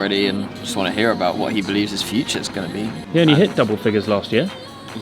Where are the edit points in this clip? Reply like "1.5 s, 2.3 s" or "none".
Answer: 1.4 s, 3.0 s